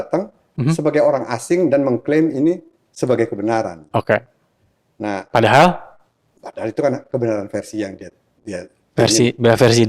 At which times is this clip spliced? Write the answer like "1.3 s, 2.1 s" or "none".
none